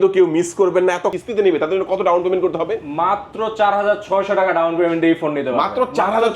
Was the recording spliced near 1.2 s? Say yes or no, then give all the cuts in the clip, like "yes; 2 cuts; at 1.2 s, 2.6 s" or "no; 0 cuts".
yes; 1 cut; at 1.2 s